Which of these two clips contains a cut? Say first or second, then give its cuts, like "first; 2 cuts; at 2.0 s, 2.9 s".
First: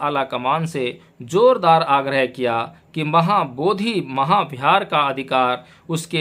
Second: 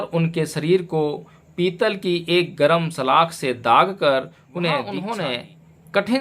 second; 1 cut; at 5.0 s